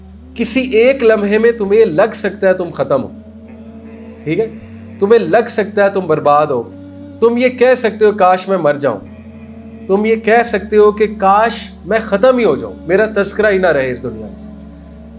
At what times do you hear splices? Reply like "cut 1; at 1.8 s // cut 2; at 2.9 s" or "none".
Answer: none